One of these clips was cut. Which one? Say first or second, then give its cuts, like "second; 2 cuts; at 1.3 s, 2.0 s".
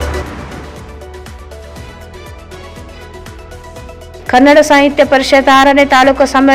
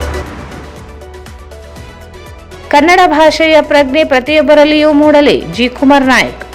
second; 1 cut; at 2.6 s